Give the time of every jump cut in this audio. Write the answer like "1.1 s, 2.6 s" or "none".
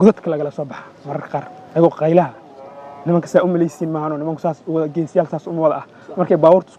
none